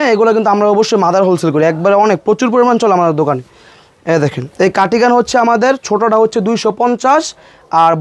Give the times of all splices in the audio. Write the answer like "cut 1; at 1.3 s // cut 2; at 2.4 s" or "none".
none